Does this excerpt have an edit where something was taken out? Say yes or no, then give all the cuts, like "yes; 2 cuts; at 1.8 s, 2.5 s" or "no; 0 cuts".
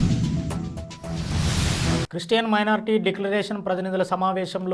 no; 0 cuts